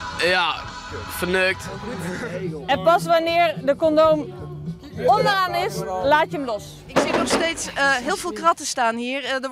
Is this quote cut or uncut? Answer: cut